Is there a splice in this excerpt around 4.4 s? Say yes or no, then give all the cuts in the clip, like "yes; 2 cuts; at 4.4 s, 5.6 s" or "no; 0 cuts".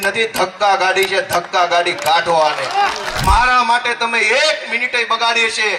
no; 1 cut; at 3.2 s